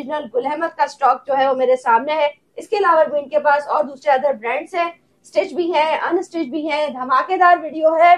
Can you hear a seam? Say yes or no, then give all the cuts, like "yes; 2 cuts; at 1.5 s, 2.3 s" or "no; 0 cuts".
no; 0 cuts